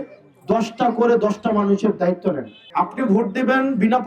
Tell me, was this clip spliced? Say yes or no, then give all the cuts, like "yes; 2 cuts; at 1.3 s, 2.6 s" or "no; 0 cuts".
yes; 1 cut; at 2.5 s